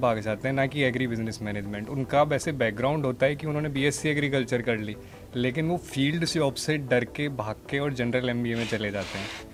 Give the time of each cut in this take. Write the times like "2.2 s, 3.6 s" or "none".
none